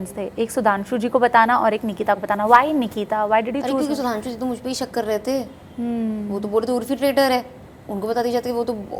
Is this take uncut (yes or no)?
yes